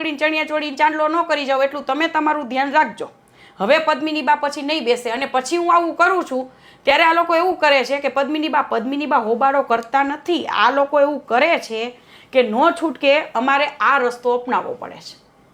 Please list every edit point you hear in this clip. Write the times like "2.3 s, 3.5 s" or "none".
none